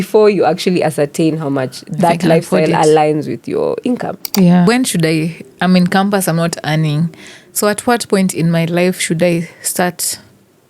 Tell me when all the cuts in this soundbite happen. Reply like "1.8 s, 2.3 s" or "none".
4.6 s